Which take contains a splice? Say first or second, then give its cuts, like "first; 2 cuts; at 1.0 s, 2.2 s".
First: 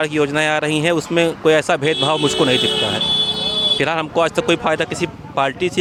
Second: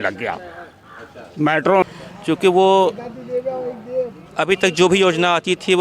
second; 1 cut; at 1.8 s